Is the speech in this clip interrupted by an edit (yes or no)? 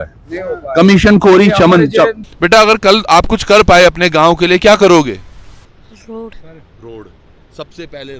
yes